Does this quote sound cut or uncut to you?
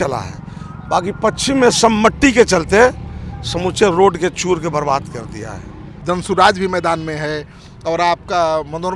cut